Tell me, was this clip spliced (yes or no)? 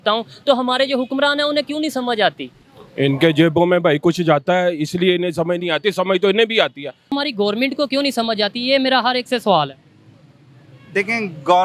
yes